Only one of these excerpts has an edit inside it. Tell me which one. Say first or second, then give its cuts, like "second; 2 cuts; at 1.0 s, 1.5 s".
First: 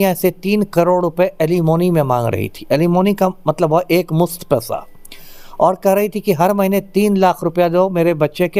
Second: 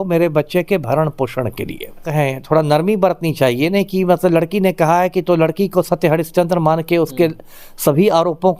second; 1 cut; at 2.1 s